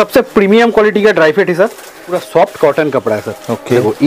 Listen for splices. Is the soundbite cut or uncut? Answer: cut